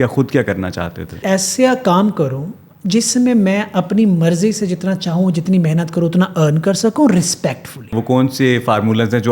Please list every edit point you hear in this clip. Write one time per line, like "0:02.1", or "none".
0:01.1
0:08.0